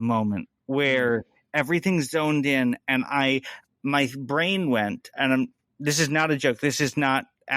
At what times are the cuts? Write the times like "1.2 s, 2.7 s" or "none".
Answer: 3.5 s